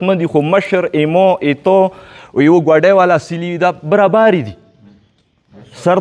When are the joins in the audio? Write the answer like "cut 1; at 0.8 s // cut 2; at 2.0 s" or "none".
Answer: none